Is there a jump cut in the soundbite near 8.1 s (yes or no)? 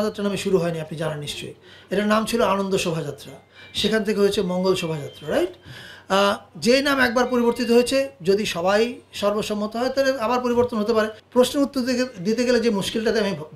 no